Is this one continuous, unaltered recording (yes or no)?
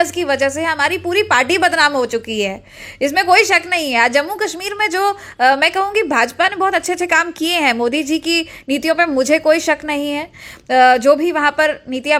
yes